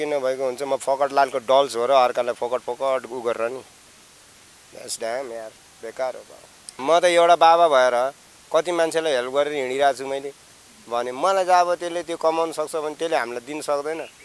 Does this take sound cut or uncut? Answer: cut